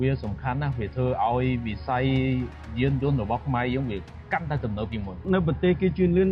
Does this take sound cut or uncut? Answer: cut